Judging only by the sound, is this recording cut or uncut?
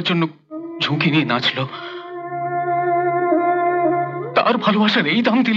uncut